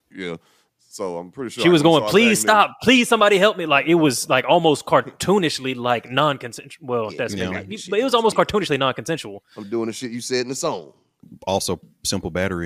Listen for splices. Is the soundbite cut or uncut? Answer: uncut